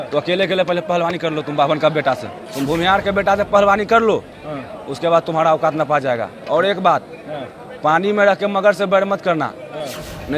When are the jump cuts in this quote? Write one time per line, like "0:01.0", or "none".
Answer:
0:02.4